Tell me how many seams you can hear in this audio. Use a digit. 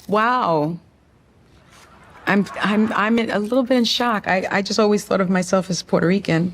0